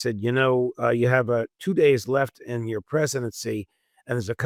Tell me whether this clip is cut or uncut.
uncut